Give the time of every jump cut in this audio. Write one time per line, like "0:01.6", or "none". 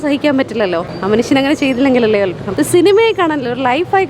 0:00.9
0:02.4